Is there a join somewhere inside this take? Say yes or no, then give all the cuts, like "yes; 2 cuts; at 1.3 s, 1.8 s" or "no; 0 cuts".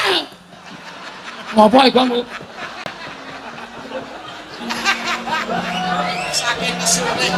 no; 0 cuts